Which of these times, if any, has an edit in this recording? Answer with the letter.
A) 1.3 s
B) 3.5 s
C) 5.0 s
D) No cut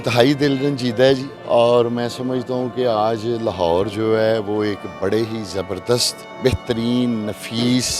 A